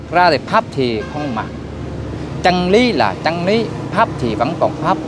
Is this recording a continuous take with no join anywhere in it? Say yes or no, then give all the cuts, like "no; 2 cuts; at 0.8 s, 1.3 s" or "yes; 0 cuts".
yes; 0 cuts